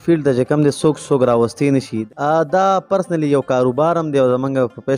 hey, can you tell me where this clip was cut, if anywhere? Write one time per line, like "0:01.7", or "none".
0:02.0